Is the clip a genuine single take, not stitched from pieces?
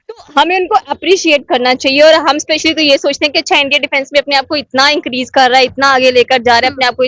yes; 0 cuts

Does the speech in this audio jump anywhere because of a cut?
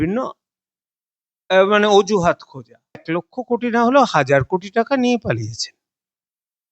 yes; 1 cut; at 3.0 s

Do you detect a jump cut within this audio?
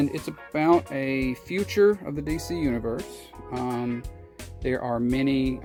no; 0 cuts

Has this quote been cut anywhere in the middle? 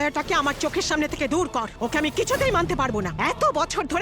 yes; 1 cut; at 1.7 s

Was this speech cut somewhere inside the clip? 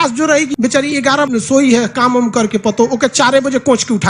yes; 1 cut; at 1.0 s

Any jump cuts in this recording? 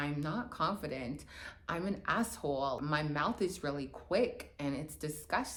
no; 0 cuts

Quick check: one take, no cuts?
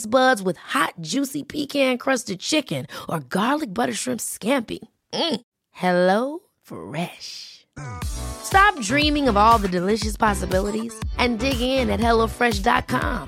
yes; 0 cuts

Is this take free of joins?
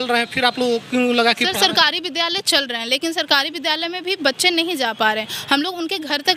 yes; 0 cuts

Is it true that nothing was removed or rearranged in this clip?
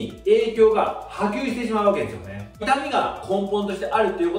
yes; 0 cuts

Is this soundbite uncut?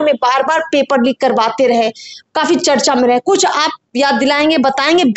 yes; 0 cuts

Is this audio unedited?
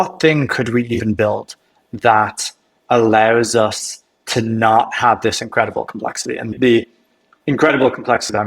no; 1 cut; at 6.5 s

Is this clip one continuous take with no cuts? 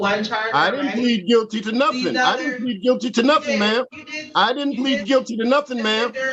yes; 0 cuts

